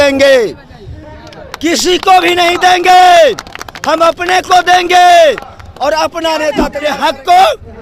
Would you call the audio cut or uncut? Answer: cut